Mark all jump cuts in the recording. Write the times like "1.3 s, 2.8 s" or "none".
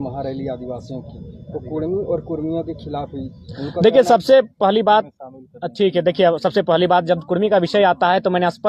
none